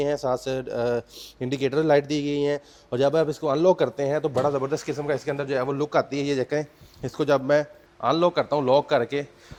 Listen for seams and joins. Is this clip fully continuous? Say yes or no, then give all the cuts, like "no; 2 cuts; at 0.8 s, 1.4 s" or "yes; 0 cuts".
yes; 0 cuts